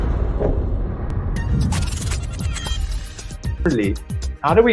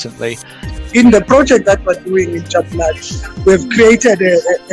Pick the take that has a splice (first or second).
first